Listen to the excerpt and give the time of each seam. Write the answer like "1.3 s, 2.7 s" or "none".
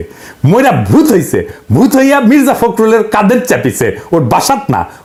none